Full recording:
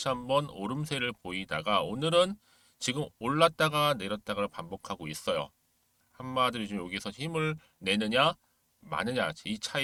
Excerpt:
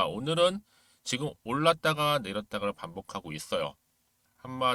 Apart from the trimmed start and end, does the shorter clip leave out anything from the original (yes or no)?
no